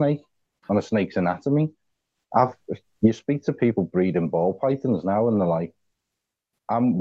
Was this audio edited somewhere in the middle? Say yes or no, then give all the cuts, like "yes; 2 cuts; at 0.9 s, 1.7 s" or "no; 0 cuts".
no; 0 cuts